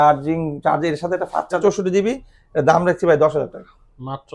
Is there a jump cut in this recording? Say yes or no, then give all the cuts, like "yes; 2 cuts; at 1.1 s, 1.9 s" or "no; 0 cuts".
yes; 1 cut; at 1.6 s